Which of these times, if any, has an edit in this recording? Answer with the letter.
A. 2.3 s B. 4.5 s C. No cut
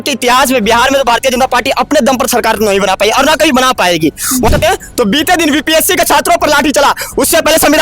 B